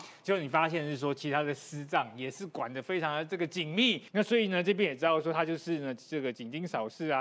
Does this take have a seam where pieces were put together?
yes; 1 cut; at 4.0 s

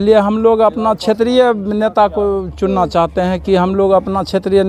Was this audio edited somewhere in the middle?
no; 0 cuts

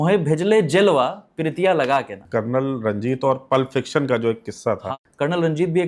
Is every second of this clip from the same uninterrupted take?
no; 2 cuts; at 2.2 s, 4.9 s

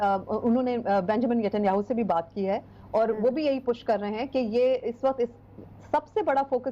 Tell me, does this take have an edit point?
no; 0 cuts

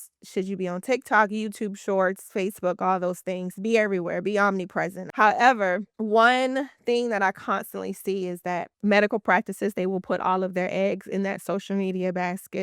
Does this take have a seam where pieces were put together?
yes; 2 cuts; at 5.0 s, 5.9 s

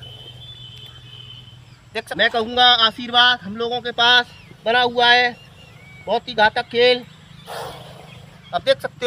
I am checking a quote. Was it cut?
yes; 1 cut; at 2.1 s

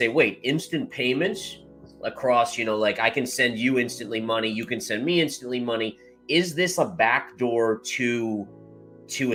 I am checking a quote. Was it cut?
no; 0 cuts

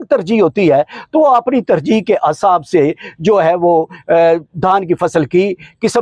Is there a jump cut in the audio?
no; 0 cuts

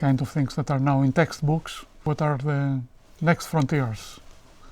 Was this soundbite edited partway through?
yes; 1 cut; at 2.1 s

